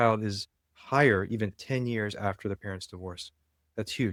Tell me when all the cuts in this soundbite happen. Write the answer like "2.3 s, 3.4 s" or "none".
none